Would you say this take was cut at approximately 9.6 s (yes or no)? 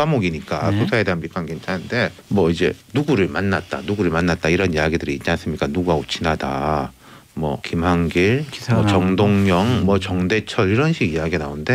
no